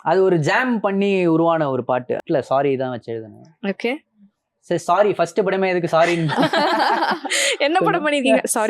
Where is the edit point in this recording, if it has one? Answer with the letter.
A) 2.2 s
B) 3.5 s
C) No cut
A